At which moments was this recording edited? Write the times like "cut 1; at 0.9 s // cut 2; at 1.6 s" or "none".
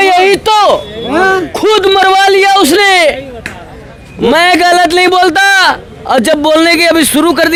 none